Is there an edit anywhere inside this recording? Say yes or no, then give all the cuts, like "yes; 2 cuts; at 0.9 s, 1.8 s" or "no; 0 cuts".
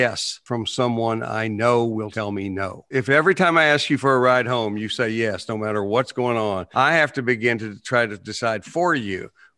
yes; 1 cut; at 2.9 s